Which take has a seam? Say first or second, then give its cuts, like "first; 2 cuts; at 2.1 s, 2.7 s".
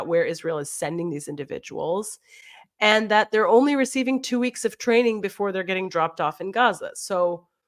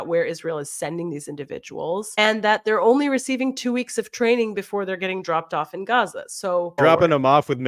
second; 2 cuts; at 2.2 s, 6.8 s